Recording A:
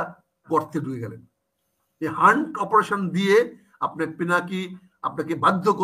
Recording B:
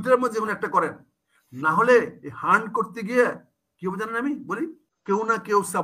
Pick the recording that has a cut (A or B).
B